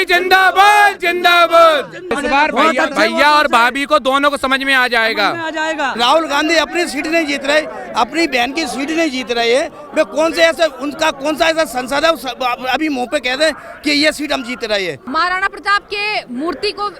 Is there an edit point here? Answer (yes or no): yes